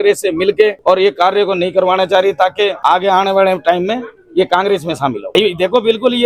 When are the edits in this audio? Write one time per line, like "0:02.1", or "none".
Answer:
0:00.8
0:02.8
0:05.3

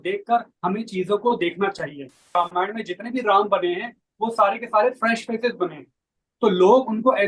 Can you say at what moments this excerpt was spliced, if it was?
0:02.3

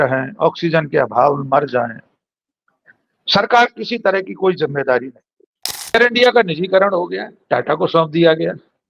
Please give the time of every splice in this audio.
0:05.9

